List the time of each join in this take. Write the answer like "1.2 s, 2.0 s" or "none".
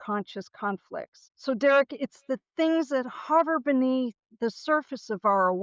1.2 s